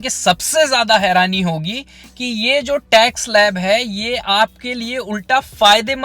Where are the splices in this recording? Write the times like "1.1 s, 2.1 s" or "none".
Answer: none